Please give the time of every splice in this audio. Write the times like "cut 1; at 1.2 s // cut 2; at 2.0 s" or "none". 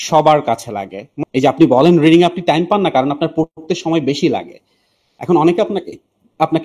cut 1; at 1.0 s